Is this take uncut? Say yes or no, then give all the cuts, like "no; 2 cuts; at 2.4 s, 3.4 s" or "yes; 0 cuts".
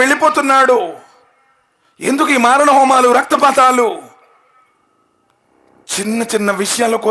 yes; 0 cuts